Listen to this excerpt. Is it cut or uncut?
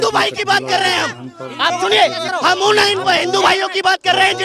cut